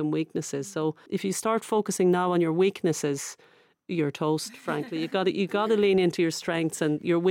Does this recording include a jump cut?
yes; 1 cut; at 1.0 s

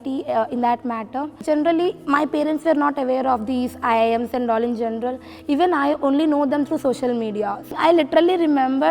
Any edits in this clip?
yes; 2 cuts; at 1.4 s, 7.7 s

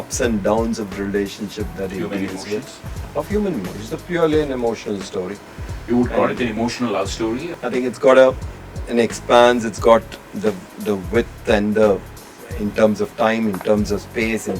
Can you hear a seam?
yes; 1 cut; at 7.5 s

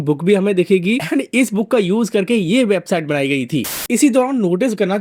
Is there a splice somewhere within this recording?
yes; 1 cut; at 3.7 s

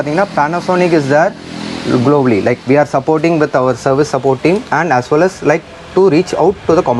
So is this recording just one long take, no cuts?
yes; 0 cuts

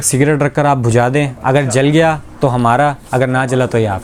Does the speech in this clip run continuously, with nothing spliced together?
yes; 0 cuts

